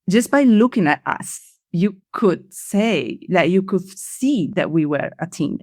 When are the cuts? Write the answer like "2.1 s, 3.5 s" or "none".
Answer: none